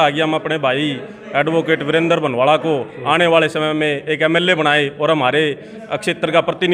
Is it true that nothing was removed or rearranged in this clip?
yes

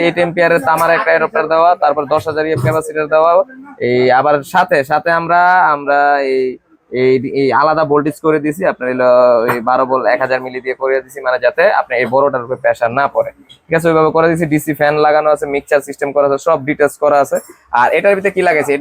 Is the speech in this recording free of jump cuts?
yes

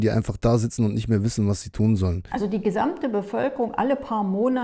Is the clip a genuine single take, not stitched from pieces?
no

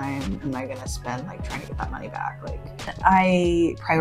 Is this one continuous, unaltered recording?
no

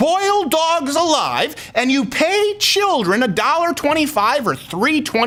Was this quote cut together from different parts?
no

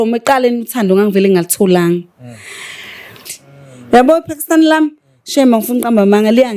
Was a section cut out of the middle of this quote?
yes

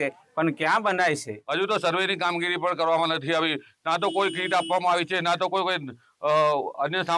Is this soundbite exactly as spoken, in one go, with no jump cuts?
no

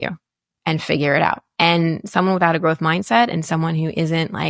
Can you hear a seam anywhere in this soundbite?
yes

